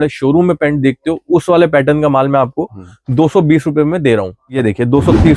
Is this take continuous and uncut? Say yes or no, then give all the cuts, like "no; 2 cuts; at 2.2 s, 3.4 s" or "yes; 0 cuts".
no; 1 cut; at 4.4 s